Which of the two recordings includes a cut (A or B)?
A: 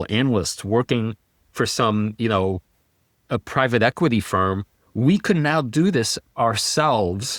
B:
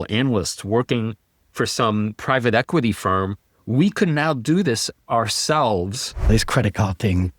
B